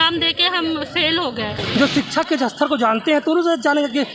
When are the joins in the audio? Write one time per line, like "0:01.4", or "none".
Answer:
0:01.6